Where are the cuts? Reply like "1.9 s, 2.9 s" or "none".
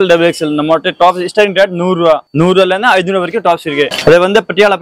3.9 s